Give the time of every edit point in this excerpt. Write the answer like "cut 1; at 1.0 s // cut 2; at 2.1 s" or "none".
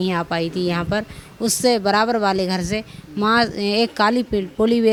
none